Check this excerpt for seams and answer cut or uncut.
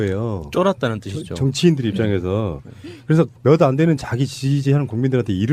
uncut